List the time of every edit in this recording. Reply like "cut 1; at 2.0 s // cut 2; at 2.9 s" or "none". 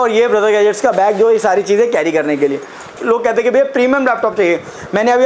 cut 1; at 2.9 s